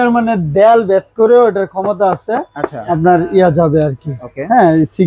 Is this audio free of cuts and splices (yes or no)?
yes